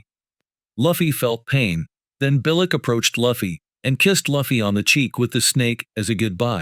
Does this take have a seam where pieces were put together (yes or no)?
no